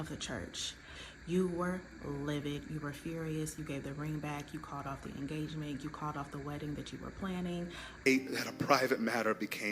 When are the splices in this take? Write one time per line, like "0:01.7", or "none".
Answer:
0:07.9